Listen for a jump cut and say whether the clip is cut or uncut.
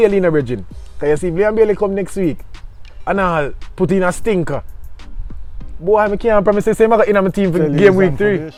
uncut